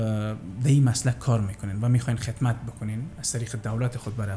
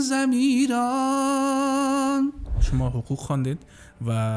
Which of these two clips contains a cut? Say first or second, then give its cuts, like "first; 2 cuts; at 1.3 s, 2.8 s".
second; 1 cut; at 2.6 s